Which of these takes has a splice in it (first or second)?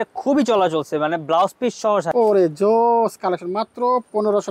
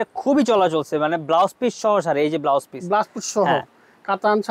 first